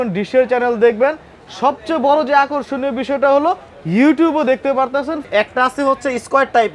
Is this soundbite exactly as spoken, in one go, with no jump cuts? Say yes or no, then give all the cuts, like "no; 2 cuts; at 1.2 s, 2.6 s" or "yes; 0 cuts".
no; 1 cut; at 5.2 s